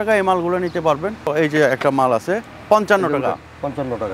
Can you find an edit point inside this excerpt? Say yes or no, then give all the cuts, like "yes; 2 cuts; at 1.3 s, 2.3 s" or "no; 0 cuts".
yes; 1 cut; at 1.3 s